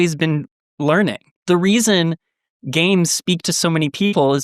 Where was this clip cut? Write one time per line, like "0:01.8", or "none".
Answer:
0:01.3